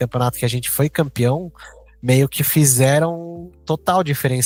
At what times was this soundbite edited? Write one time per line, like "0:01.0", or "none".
none